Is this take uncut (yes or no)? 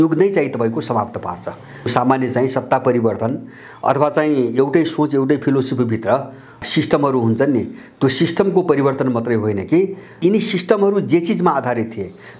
no